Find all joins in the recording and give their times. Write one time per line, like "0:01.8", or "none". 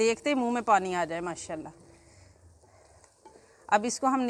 none